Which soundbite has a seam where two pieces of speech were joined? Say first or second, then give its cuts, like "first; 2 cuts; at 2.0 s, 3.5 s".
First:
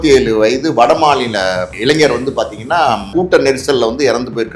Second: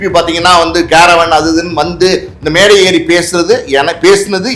first; 2 cuts; at 1.7 s, 3.1 s